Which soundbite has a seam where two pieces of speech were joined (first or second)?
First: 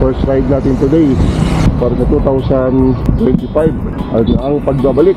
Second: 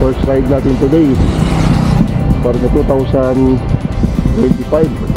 first